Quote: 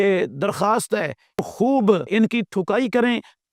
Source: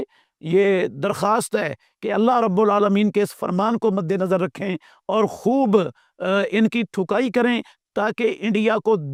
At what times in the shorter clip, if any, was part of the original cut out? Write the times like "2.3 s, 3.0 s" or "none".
1.4 s, 2.1 s